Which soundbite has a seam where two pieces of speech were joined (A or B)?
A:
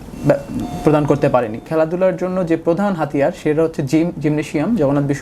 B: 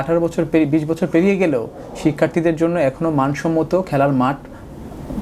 A